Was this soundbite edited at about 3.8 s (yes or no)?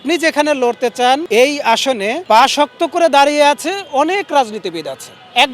no